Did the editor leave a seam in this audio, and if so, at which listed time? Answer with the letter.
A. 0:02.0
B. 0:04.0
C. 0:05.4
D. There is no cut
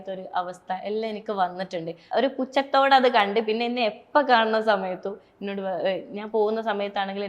A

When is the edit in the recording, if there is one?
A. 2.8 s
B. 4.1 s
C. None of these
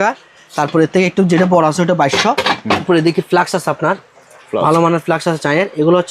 A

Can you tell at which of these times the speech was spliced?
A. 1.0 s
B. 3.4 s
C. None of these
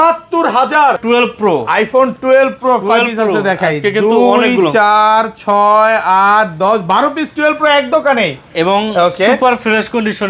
A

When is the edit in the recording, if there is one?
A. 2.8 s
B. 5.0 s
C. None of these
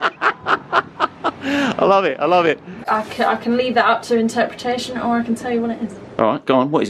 A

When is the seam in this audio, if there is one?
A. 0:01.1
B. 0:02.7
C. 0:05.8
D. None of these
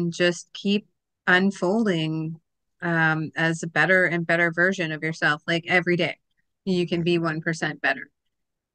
D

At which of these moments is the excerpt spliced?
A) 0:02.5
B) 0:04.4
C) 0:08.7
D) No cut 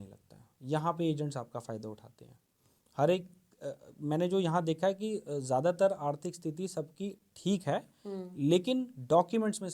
D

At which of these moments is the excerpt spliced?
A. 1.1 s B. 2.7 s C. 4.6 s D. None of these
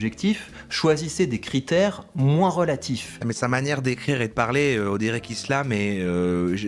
D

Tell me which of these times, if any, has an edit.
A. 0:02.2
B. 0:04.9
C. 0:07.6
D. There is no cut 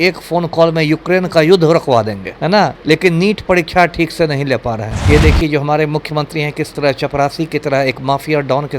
B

